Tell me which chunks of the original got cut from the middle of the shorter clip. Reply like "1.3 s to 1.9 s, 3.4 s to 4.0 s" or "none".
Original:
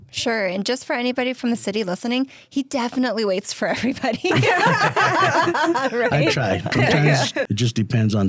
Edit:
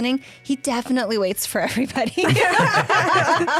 none